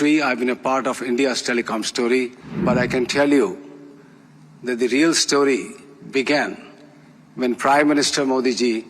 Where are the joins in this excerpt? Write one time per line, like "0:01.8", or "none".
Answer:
0:02.4